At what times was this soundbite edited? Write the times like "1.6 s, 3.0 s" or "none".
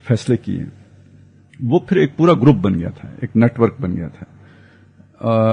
none